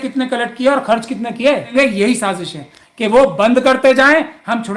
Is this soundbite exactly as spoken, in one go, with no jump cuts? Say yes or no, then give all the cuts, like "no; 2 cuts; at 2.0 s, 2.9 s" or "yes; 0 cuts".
no; 1 cut; at 1.7 s